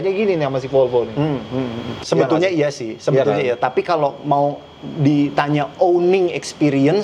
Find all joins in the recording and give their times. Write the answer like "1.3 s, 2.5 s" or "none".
2.0 s